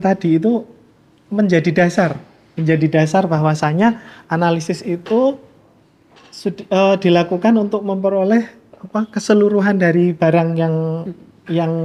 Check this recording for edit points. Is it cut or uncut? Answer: uncut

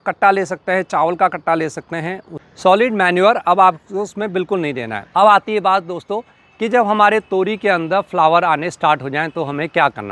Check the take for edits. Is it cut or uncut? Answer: cut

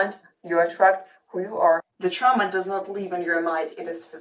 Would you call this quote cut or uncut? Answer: cut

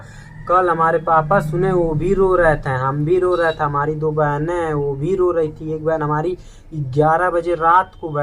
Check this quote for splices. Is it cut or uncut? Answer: uncut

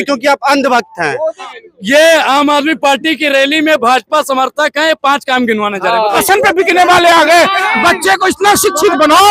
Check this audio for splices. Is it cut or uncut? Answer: cut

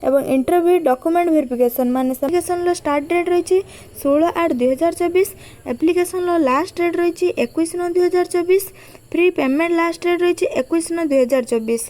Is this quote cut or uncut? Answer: cut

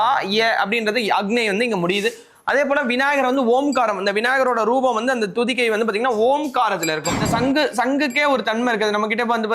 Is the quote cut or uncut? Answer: cut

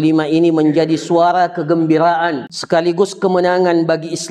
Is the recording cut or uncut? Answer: cut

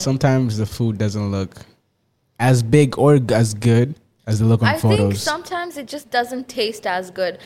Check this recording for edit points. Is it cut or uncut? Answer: uncut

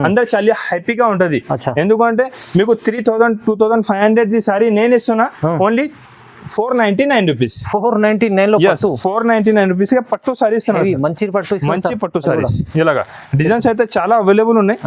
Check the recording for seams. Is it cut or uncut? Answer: uncut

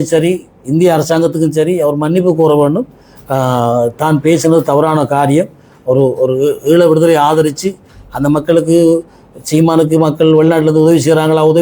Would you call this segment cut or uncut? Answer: uncut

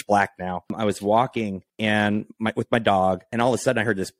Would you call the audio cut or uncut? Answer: cut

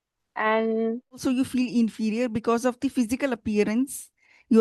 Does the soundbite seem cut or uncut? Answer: cut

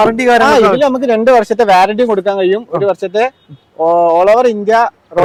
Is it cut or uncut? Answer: uncut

